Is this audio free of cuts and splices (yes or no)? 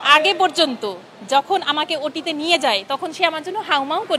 yes